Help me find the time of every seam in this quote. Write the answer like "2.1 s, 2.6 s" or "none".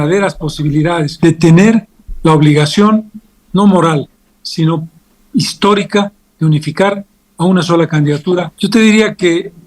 1.1 s, 8.5 s